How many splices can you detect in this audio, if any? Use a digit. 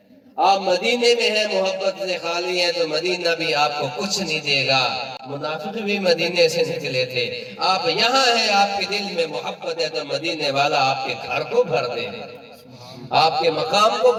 0